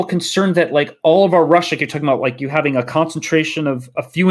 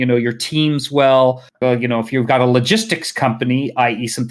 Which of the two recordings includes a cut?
second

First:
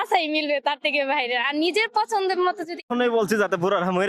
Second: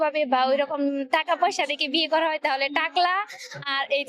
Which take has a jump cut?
first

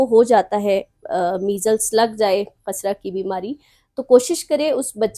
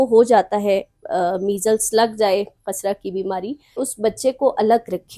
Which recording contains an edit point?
second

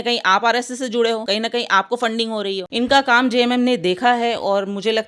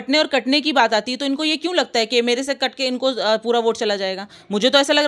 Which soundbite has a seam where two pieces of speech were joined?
first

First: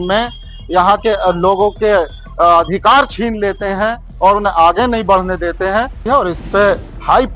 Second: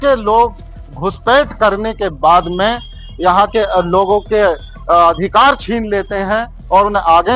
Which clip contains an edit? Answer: first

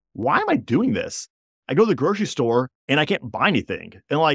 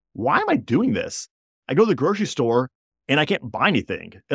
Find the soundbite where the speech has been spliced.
first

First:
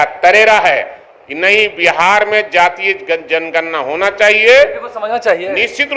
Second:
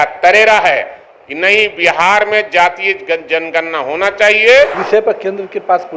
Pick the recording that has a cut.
second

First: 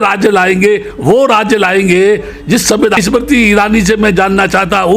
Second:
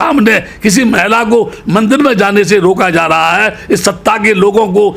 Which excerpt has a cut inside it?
first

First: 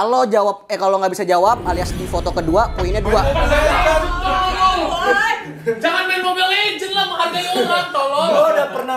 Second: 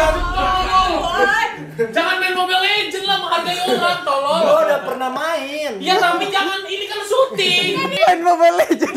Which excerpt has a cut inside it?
second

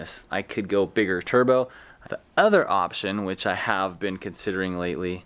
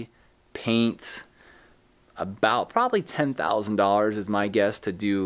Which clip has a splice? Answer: first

